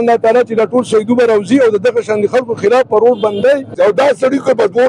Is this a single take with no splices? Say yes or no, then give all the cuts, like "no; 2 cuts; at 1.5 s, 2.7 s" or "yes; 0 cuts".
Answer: no; 1 cut; at 3.8 s